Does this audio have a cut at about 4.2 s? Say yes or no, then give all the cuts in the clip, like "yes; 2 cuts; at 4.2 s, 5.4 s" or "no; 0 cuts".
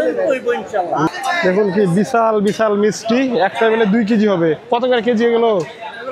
no; 1 cut; at 1.1 s